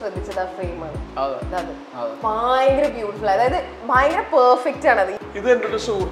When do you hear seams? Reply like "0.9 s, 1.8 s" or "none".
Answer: 5.2 s